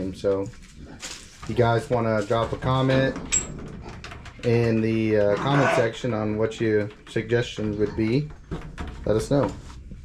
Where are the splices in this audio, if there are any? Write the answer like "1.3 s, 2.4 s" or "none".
none